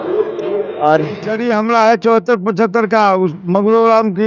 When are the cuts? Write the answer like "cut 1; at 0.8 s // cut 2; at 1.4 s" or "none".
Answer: cut 1; at 1.3 s